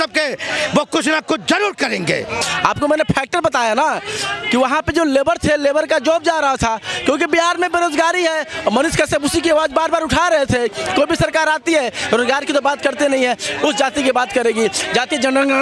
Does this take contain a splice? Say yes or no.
yes